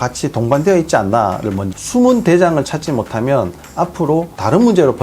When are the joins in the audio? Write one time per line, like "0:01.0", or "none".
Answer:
0:01.6